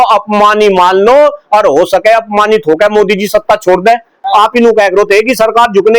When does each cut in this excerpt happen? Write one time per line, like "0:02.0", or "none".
0:04.2